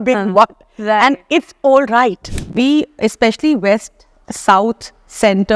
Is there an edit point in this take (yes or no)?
yes